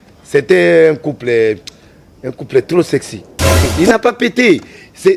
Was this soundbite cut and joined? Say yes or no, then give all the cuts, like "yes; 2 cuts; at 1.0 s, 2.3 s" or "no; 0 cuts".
yes; 1 cut; at 3.7 s